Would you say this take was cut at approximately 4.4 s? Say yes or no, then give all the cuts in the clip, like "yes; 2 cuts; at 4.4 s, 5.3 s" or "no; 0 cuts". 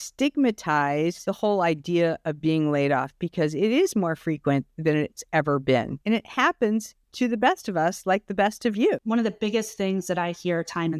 no; 3 cuts; at 1.2 s, 5.9 s, 9.0 s